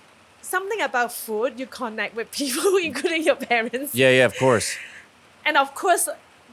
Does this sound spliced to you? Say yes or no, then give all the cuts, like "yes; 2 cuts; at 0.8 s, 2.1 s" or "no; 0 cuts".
no; 0 cuts